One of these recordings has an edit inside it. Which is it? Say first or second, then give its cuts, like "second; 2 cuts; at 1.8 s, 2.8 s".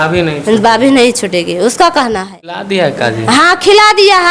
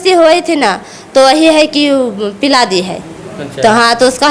first; 1 cut; at 2.6 s